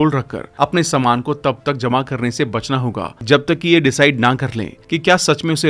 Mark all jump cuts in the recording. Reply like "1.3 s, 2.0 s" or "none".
none